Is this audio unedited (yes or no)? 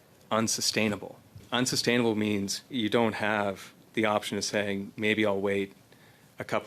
no